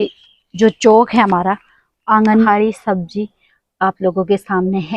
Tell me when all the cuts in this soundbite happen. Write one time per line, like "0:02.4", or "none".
0:02.5